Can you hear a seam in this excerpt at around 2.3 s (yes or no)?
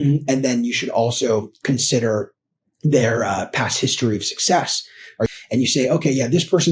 no